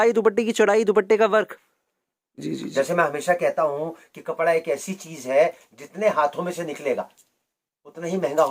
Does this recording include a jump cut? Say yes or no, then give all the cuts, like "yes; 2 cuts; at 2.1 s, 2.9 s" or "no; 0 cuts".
yes; 1 cut; at 2.4 s